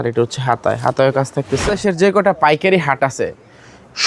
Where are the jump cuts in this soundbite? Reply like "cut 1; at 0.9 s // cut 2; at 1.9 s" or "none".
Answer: cut 1; at 1.7 s